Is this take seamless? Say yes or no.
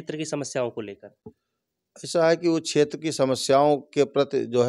yes